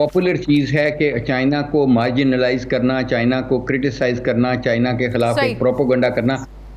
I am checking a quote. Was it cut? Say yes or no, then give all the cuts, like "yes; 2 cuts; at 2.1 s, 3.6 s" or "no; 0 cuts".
no; 0 cuts